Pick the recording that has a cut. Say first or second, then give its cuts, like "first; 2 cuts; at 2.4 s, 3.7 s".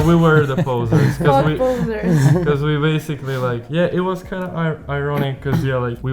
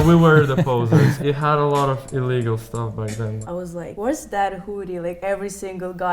second; 2 cuts; at 1.1 s, 3.4 s